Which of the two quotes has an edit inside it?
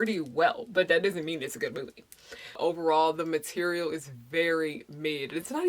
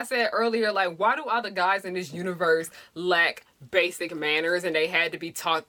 first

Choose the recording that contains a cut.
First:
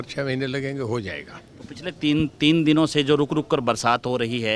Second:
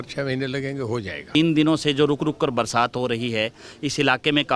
second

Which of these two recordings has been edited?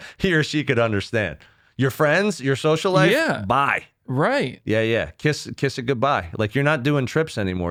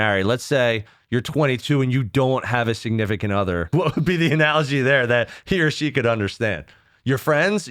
second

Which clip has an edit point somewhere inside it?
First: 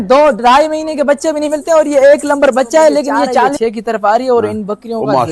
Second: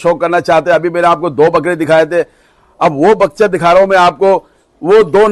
first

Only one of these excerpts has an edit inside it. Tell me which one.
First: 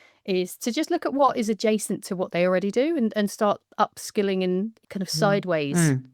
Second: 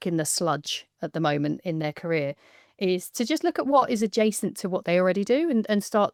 first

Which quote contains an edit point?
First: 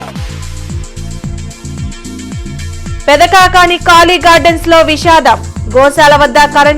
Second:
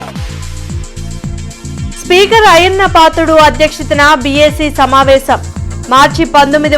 first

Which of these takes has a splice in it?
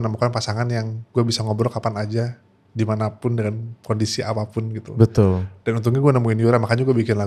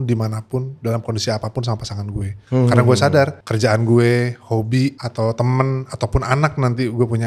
second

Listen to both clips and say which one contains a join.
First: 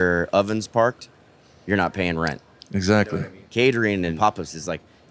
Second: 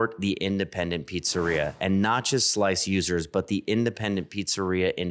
first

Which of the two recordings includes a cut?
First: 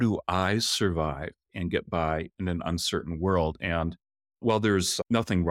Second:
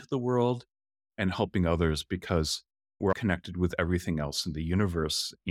second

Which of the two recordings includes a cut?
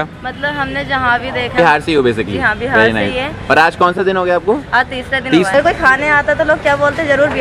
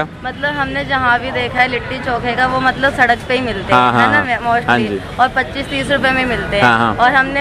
first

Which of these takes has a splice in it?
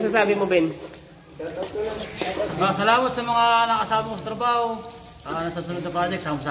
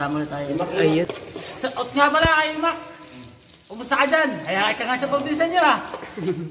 second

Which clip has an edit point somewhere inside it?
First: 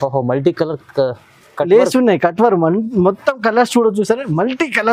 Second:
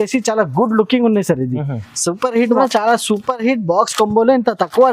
second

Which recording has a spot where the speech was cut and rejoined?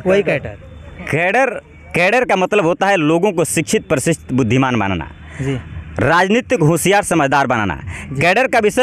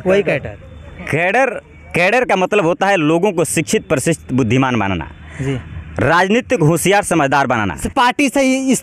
second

